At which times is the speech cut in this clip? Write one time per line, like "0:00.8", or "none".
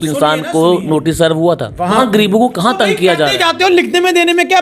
0:02.0